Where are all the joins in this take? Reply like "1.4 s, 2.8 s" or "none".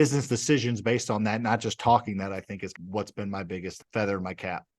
2.8 s, 3.8 s